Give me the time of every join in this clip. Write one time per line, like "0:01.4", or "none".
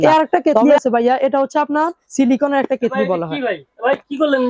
none